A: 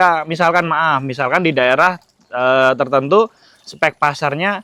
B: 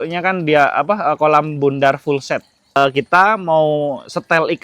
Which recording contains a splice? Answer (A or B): B